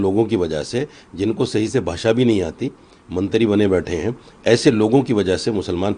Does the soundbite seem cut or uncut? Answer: uncut